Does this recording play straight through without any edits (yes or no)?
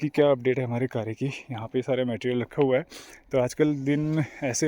yes